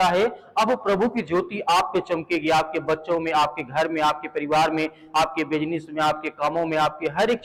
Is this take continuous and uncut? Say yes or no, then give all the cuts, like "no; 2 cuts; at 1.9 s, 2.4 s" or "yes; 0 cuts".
yes; 0 cuts